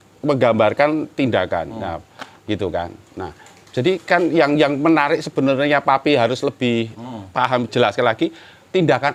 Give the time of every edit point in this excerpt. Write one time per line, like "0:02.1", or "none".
none